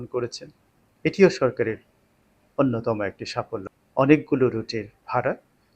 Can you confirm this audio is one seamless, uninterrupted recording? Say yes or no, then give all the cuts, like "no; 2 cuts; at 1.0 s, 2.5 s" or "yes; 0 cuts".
no; 1 cut; at 3.6 s